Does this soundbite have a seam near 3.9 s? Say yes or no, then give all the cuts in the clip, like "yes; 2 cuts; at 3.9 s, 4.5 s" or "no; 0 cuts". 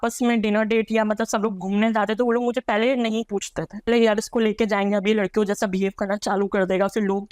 yes; 1 cut; at 3.9 s